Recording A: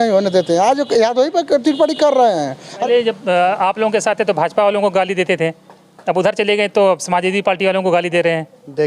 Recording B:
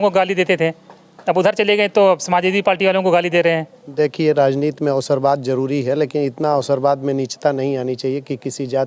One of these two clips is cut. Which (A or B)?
A